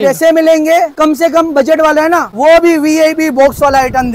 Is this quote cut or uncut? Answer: cut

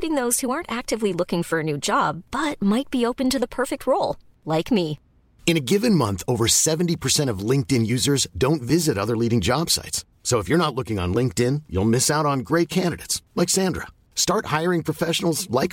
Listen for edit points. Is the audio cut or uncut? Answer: uncut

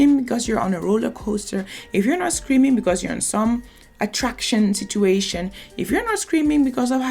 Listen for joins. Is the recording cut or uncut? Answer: uncut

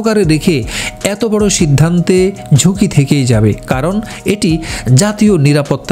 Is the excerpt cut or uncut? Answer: uncut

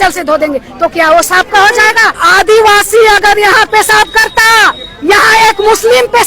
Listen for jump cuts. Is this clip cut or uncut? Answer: cut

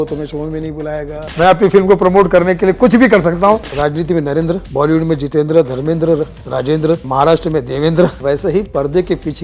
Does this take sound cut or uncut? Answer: cut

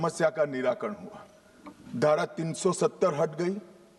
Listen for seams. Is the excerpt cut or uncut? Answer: uncut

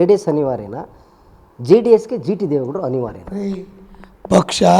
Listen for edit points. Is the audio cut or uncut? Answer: uncut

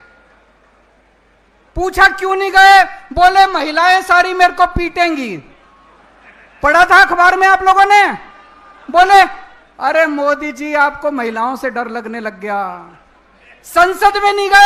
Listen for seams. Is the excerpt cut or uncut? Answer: uncut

